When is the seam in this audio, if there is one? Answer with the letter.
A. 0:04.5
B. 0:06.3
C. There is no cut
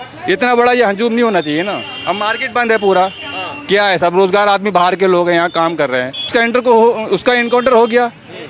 B